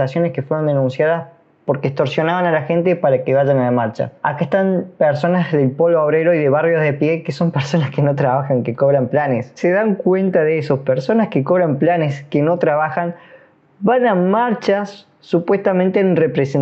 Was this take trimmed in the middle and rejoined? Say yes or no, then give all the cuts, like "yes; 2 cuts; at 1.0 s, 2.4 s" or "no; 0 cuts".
yes; 2 cuts; at 4.1 s, 9.5 s